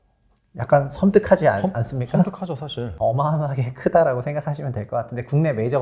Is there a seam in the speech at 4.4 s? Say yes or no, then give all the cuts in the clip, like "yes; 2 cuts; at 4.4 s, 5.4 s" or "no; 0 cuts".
no; 1 cut; at 2.9 s